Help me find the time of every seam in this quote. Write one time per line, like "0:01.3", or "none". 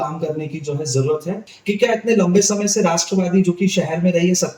0:01.5